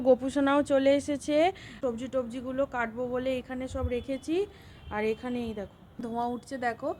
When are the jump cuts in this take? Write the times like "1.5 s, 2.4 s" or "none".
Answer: 1.8 s, 6.1 s